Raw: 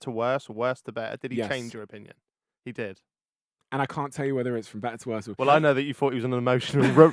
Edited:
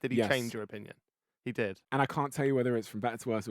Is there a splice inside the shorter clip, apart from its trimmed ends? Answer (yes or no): yes